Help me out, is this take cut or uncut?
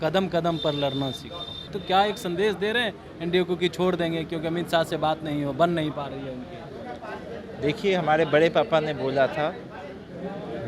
cut